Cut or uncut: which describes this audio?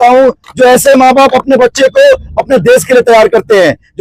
uncut